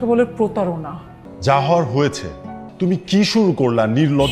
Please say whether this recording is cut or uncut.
cut